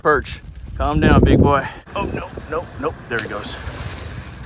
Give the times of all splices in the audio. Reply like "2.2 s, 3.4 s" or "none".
1.8 s